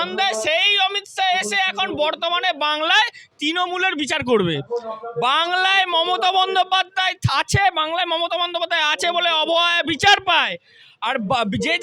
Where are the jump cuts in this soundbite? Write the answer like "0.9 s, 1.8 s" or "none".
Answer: none